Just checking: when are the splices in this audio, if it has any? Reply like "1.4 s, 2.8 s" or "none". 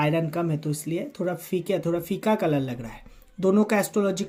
none